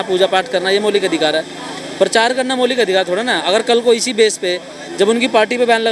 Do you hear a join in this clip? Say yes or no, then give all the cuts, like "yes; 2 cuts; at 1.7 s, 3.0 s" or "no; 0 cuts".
no; 0 cuts